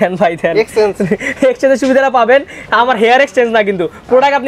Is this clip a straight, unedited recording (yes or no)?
yes